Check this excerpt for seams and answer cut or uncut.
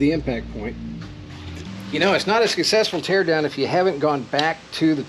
cut